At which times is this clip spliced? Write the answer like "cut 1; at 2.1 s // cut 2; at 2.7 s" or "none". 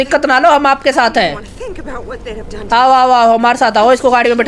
none